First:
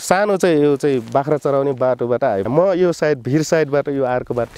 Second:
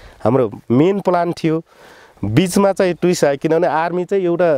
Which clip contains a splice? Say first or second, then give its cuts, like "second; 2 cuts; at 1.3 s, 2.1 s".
first; 1 cut; at 2.5 s